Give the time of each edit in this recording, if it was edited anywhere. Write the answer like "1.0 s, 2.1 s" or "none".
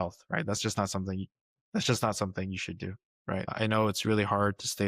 3.5 s